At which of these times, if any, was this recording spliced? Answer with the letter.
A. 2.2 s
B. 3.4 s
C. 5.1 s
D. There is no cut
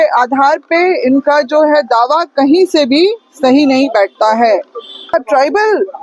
C